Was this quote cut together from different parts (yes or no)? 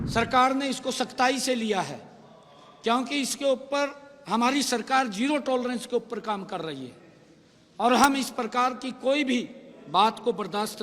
no